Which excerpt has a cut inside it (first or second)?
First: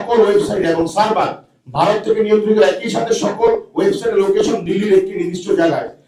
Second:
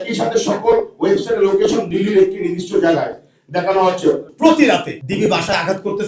second